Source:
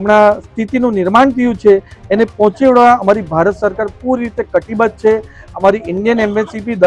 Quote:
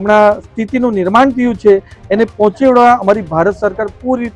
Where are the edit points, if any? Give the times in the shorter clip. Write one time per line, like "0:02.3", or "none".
none